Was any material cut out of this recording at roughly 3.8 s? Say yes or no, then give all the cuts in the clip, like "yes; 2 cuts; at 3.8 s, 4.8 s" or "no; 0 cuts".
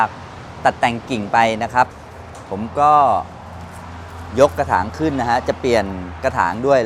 no; 0 cuts